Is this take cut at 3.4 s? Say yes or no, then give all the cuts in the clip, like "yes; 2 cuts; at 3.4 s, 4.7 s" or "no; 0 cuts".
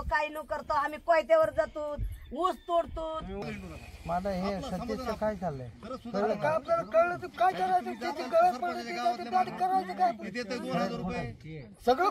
yes; 1 cut; at 3.4 s